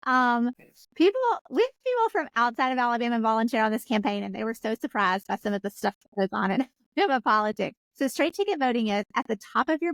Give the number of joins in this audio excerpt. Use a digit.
0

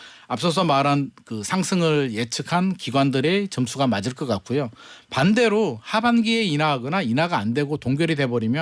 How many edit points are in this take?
0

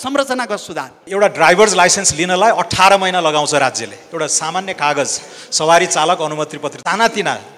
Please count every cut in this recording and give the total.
1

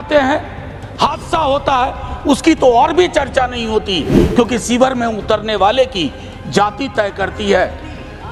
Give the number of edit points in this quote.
0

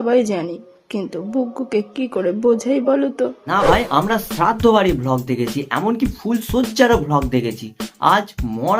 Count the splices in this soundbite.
1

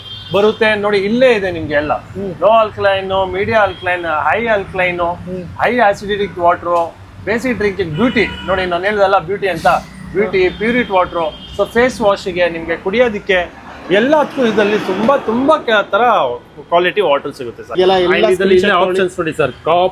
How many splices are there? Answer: 1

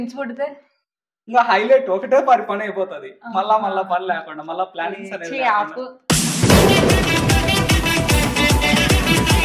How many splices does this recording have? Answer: 2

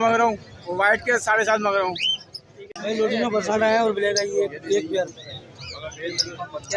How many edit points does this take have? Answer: 1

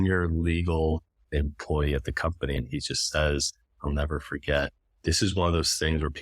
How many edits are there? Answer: 1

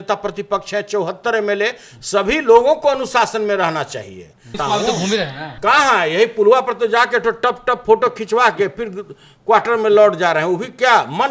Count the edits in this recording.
1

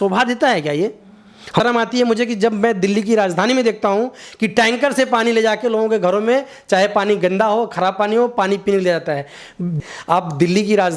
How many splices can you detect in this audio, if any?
2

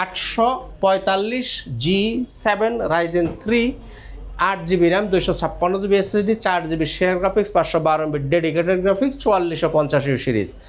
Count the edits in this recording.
0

